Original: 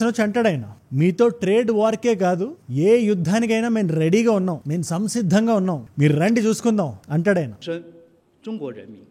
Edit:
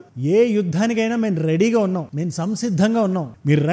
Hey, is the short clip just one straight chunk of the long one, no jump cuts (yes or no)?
yes